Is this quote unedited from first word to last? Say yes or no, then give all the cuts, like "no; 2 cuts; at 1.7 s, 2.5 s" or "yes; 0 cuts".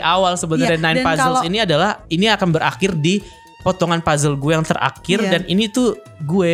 yes; 0 cuts